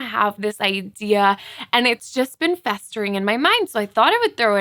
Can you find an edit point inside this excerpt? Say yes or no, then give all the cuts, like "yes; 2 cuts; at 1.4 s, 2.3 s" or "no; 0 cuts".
no; 0 cuts